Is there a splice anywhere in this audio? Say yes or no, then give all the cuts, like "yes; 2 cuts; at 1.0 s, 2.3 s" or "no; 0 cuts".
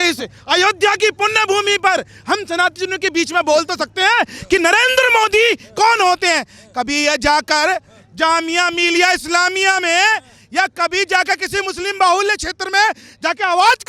no; 0 cuts